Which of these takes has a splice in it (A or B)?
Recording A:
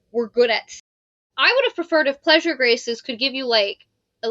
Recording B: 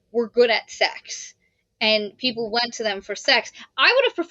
A